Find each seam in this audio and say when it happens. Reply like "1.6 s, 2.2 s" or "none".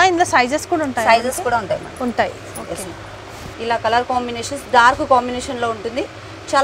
3.5 s